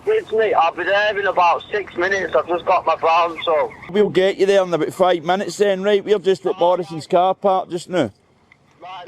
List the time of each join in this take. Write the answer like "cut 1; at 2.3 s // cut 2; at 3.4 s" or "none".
none